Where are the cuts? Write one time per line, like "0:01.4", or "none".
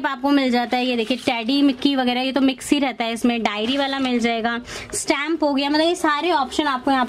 none